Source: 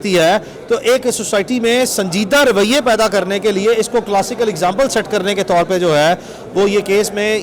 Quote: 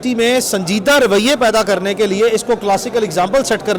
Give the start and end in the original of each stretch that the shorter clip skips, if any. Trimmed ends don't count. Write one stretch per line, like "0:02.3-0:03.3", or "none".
none

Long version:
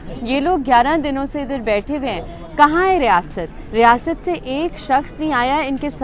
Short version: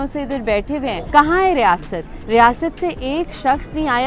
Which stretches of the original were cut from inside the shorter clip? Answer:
0:02.2-0:02.5

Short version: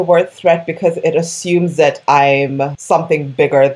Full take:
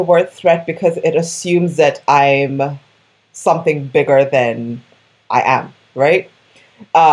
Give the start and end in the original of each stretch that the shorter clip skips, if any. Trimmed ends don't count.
0:02.8-0:03.3

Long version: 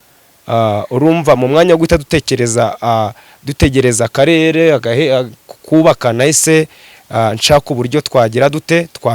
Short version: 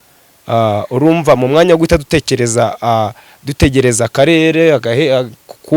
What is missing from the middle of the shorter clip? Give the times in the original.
none

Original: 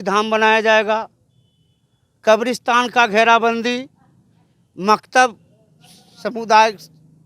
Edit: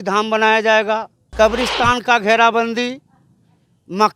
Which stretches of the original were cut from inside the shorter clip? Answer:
0:01.2-0:02.0

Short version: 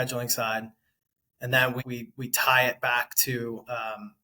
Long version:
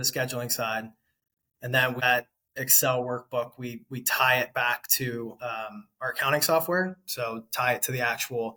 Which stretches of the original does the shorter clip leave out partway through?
0:02.0-0:03.5

